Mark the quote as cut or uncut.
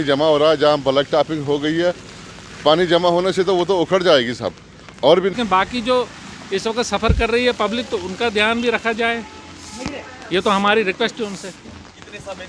cut